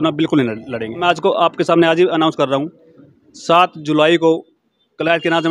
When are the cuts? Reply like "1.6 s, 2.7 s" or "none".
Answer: 1.0 s

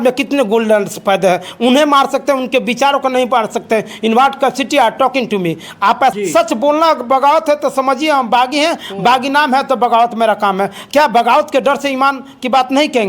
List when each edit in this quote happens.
6.1 s

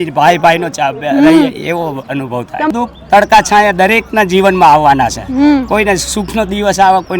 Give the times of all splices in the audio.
2.7 s

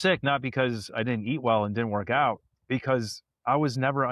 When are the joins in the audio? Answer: 2.5 s

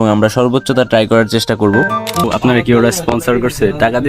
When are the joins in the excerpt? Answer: 2.2 s

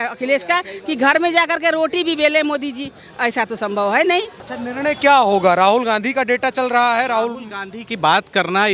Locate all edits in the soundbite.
4.4 s

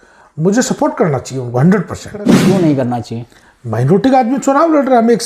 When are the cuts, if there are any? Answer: 2.4 s

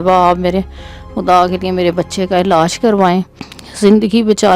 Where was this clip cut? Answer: none

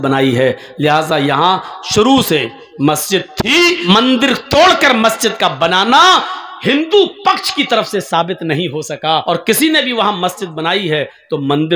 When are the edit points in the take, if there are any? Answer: 3.8 s, 9.2 s

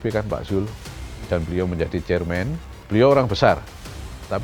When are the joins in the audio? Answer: 2.8 s

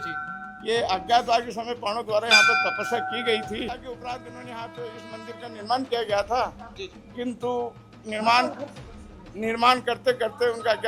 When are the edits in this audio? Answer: 3.7 s

